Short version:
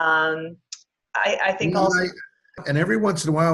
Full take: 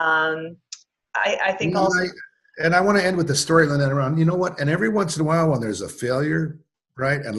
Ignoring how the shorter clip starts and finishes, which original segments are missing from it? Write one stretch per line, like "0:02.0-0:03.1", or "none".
0:02.6-0:04.5